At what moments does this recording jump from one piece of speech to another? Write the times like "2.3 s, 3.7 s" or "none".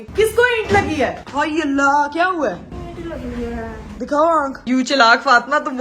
1.2 s, 4.6 s